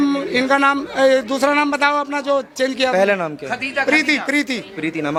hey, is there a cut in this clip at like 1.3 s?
no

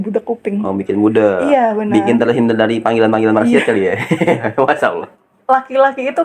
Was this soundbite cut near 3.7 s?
no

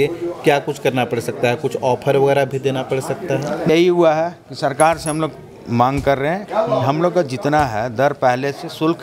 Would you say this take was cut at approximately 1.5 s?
no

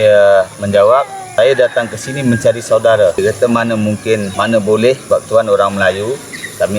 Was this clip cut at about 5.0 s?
yes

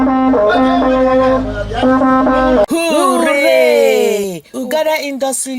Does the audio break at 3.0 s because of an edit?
yes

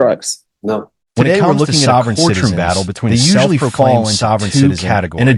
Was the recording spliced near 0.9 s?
no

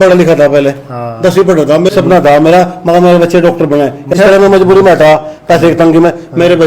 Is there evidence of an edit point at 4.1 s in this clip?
yes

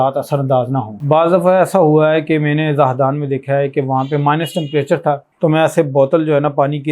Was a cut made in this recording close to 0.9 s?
yes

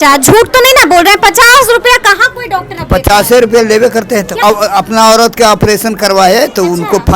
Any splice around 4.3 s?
yes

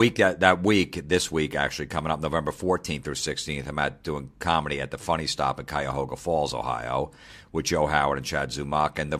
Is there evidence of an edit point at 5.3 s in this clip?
yes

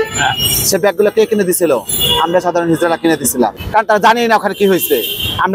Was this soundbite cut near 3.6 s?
yes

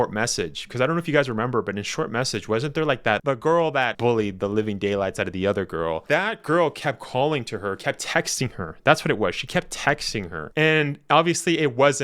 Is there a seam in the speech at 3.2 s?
yes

